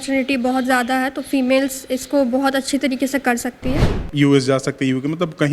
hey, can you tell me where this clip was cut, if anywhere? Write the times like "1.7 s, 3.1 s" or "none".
4.0 s